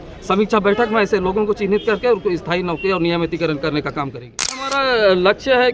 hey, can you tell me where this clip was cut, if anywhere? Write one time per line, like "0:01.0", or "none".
0:04.6